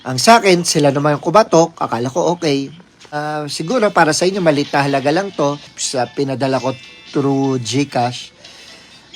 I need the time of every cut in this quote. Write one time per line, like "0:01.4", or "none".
0:03.2
0:05.7